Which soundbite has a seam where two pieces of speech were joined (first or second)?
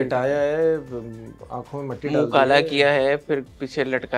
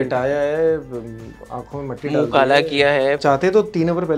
second